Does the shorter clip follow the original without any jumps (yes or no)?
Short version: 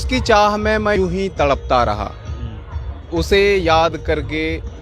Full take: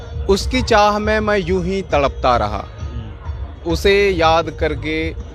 no